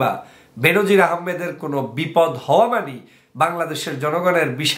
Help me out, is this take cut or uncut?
uncut